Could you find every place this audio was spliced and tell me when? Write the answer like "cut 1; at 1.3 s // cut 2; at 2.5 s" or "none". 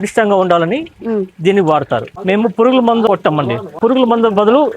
cut 1; at 2.1 s // cut 2; at 3.8 s